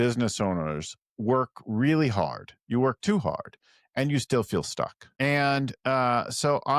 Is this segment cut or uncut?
uncut